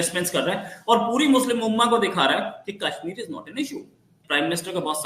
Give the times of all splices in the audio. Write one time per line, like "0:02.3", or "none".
0:04.1